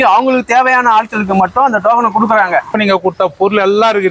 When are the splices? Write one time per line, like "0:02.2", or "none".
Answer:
0:02.7